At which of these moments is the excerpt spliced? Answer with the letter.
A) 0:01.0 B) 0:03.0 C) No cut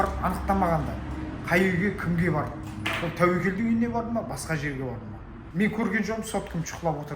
C